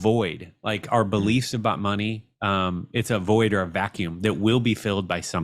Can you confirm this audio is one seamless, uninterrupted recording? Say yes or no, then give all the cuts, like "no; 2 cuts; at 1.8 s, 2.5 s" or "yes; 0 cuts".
yes; 0 cuts